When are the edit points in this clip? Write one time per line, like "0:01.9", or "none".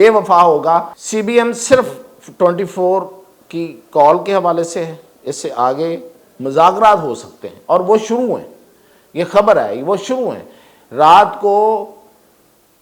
0:01.0